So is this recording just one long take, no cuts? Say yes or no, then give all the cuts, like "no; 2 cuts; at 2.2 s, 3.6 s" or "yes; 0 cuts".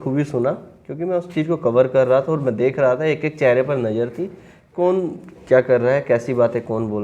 yes; 0 cuts